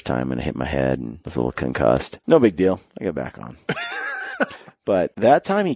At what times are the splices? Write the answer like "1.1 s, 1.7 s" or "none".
1.2 s, 2.1 s, 2.9 s, 4.7 s